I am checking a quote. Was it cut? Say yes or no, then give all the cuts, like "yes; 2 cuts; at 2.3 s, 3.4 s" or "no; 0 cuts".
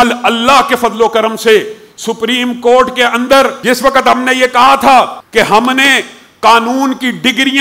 yes; 2 cuts; at 3.6 s, 5.2 s